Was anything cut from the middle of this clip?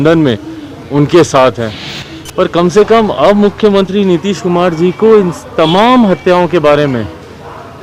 no; 0 cuts

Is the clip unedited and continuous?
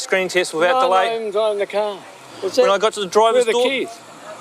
no; 1 cut; at 2.3 s

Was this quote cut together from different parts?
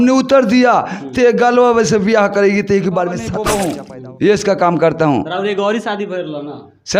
yes; 1 cut; at 3.4 s

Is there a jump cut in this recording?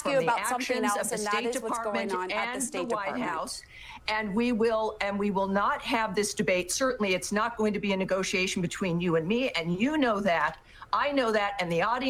no; 0 cuts

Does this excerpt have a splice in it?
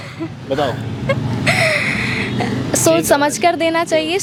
no; 0 cuts

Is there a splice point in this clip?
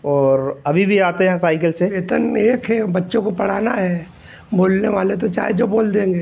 yes; 1 cut; at 2.0 s

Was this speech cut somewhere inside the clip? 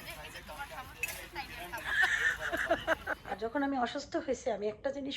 yes; 1 cut; at 3.2 s

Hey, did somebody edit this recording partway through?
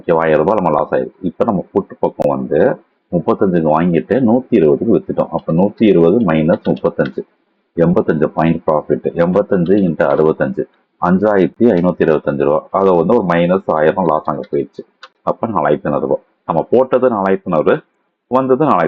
no; 0 cuts

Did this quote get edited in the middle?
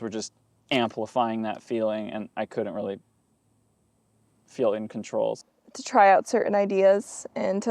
yes; 1 cut; at 5.4 s

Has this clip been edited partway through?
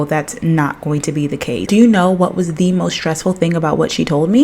yes; 1 cut; at 1.6 s

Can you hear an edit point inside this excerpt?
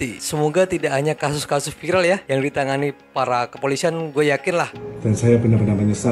yes; 1 cut; at 4.8 s

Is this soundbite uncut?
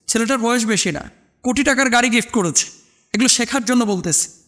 no; 1 cut; at 3.0 s

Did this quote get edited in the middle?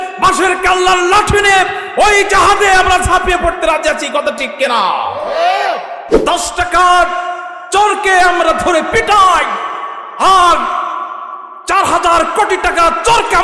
yes; 1 cut; at 6.0 s

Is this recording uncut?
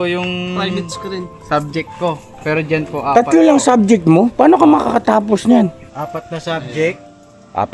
no; 1 cut; at 5.8 s

